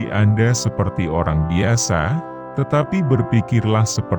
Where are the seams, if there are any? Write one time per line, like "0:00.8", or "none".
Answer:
none